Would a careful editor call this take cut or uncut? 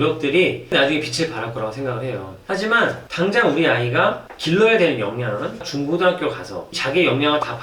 cut